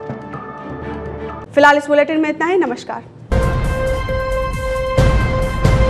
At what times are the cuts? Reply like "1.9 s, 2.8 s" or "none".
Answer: none